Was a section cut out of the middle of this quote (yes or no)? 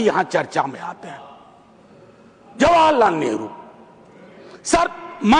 no